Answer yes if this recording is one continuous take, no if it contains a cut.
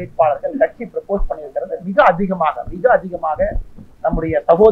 yes